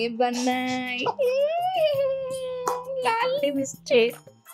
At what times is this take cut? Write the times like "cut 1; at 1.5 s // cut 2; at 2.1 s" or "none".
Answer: none